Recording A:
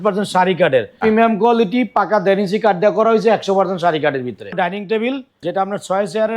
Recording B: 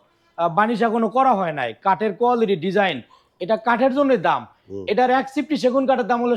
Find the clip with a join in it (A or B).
A